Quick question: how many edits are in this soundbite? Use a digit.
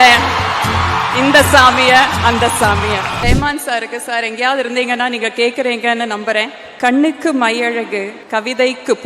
3